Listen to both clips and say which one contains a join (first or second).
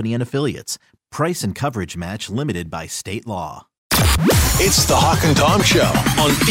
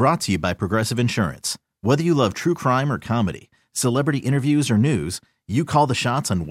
first